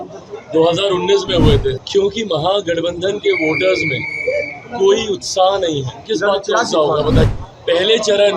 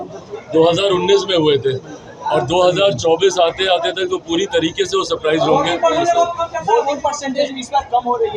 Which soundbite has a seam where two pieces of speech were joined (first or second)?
first